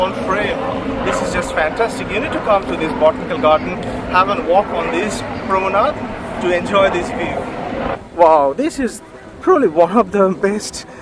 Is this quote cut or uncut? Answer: uncut